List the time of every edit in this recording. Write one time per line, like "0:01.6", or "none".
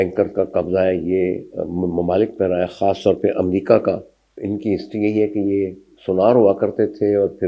0:04.4